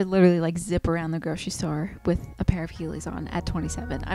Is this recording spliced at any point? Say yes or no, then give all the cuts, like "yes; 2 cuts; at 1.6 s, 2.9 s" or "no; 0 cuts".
no; 0 cuts